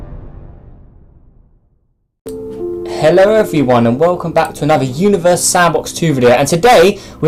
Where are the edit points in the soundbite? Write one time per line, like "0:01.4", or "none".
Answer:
none